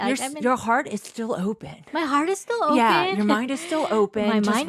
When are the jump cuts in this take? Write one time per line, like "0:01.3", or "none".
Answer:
none